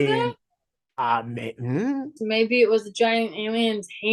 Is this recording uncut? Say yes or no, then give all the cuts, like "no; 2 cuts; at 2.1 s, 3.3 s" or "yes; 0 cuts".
no; 1 cut; at 2.2 s